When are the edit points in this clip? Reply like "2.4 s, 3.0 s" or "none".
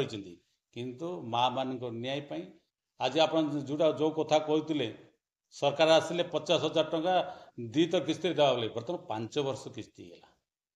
none